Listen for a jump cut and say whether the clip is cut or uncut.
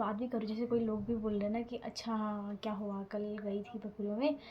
uncut